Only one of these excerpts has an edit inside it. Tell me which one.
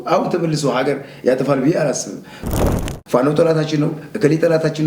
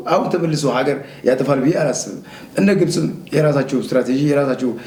first; 1 cut; at 2.6 s

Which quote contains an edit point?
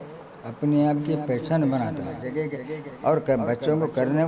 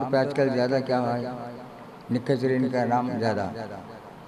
first; 1 cut; at 2.3 s

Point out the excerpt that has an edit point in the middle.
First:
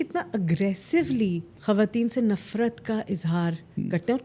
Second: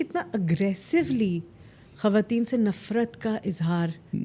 first; 1 cut; at 1.5 s

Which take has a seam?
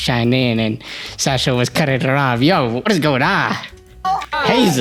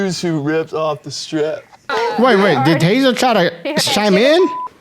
second; 1 cut; at 1.9 s

